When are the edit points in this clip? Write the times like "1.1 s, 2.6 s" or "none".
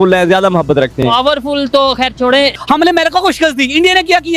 2.5 s